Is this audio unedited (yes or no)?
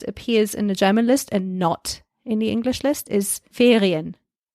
no